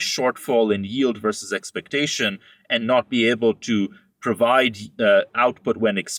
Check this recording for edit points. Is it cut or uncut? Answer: uncut